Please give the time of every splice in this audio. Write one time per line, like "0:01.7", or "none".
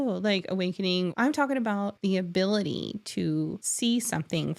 0:01.1
0:01.9
0:03.6